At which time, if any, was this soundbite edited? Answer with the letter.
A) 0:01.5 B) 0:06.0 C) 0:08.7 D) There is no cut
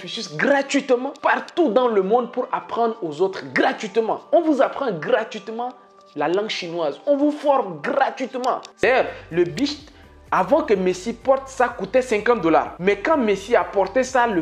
C